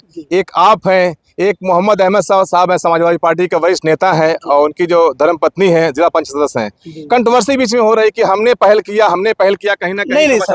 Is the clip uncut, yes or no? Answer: yes